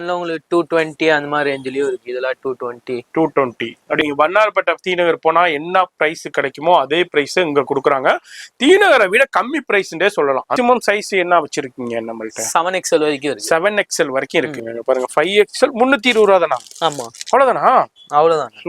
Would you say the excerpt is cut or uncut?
cut